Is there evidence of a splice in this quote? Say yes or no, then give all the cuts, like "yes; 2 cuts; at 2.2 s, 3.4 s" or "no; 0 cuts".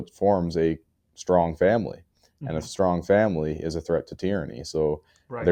no; 0 cuts